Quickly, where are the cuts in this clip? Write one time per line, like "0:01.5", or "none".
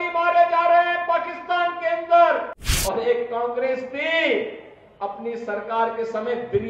0:02.7